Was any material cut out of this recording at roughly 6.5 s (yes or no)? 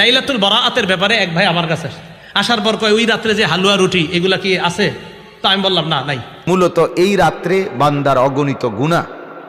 yes